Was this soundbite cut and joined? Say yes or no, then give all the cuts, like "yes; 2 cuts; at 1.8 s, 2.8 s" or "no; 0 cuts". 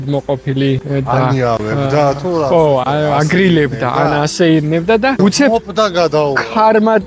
no; 0 cuts